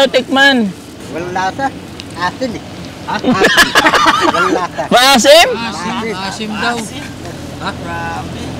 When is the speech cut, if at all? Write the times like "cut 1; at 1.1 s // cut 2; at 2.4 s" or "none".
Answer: cut 1; at 1.0 s